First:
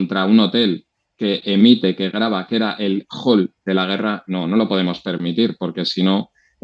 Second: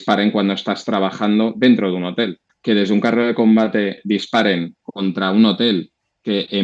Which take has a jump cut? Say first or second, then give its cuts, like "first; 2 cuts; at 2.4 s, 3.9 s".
second; 1 cut; at 2.5 s